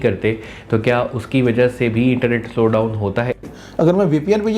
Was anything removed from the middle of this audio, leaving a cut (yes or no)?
yes